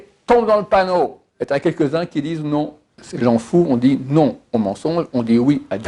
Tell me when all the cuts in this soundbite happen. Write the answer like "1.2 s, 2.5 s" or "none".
1.2 s, 3.0 s